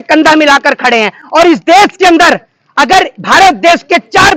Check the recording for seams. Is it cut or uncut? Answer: uncut